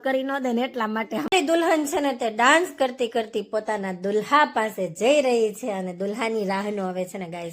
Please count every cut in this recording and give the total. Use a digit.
1